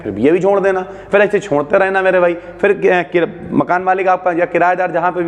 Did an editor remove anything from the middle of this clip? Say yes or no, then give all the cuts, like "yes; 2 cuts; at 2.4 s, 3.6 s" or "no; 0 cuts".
no; 0 cuts